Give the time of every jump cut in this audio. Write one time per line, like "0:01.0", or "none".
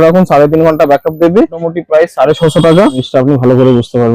0:01.6
0:03.0